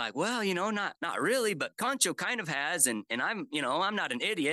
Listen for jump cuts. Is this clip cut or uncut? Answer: cut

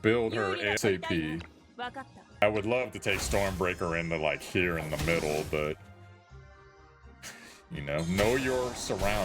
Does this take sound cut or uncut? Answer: cut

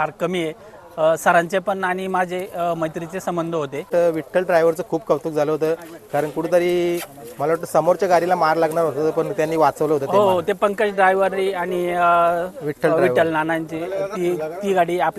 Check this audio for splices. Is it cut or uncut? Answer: cut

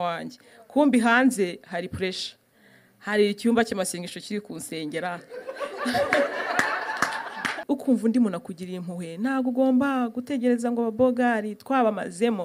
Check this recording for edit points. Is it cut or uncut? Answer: cut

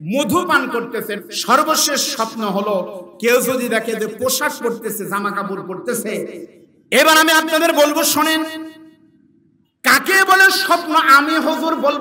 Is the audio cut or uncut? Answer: cut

